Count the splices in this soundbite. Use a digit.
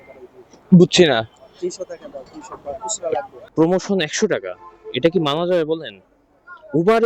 1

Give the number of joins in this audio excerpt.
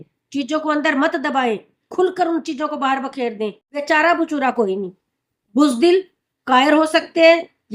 1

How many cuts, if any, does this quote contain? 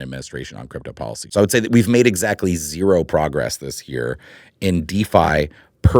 1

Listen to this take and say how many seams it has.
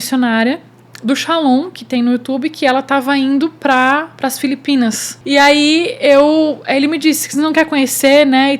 1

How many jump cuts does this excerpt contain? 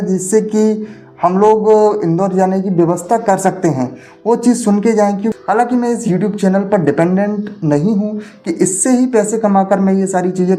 1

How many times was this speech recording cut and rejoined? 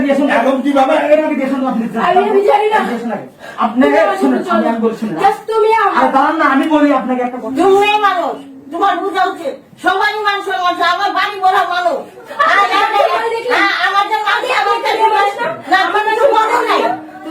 1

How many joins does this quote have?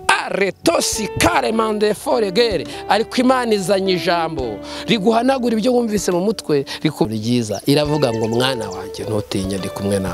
1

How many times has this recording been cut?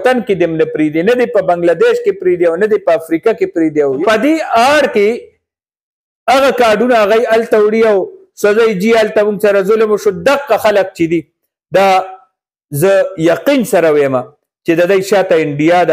1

